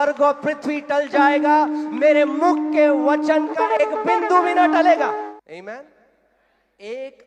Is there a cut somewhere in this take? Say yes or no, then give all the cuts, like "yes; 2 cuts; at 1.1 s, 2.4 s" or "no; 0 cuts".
yes; 1 cut; at 5.3 s